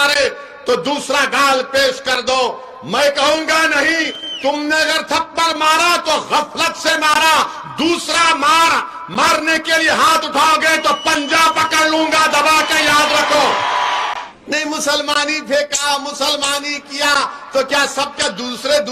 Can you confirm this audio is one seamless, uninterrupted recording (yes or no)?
no